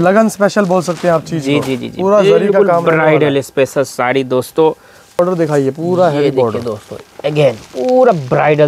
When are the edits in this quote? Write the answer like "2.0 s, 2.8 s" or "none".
5.2 s